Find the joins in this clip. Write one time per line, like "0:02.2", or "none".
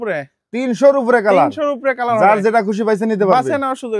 none